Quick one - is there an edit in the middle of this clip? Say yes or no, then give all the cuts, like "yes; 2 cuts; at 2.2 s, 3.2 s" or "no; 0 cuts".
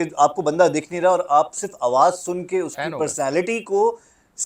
no; 0 cuts